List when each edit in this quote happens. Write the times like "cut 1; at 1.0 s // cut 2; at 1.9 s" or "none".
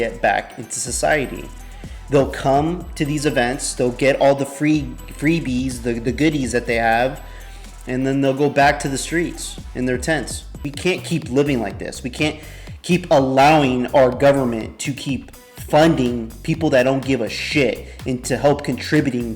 cut 1; at 10.6 s